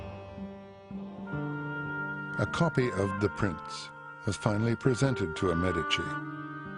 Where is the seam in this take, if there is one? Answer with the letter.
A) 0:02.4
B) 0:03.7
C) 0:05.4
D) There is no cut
C